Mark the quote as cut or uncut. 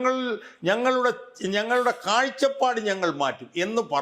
uncut